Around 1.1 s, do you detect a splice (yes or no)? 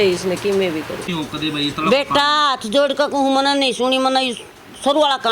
yes